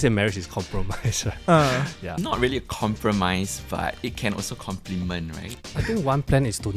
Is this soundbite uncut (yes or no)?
no